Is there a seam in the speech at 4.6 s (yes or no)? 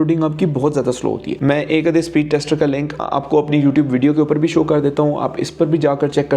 no